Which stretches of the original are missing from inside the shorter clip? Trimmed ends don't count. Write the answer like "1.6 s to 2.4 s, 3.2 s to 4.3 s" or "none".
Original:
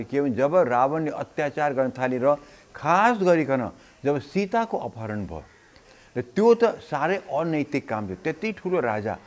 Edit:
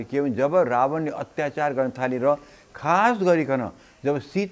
none